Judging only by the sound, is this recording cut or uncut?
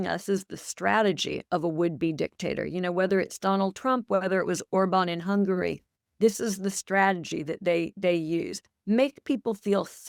uncut